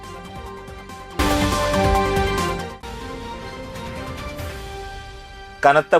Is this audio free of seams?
no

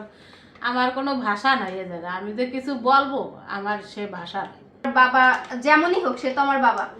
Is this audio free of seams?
no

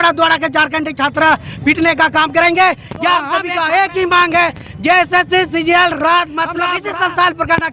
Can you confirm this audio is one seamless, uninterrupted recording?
no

